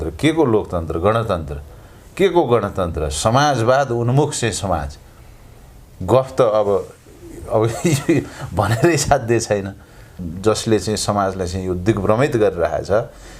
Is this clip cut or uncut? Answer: cut